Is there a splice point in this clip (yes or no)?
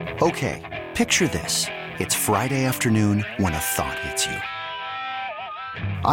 no